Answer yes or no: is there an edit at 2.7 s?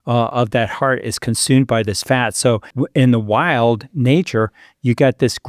yes